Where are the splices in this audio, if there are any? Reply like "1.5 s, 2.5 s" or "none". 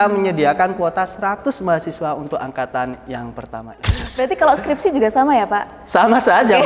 4.1 s